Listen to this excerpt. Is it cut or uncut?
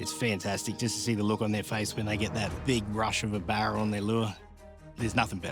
cut